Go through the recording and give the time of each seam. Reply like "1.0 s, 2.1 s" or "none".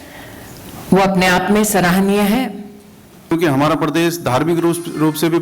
3.3 s